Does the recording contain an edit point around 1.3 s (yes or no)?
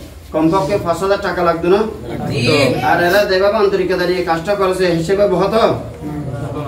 no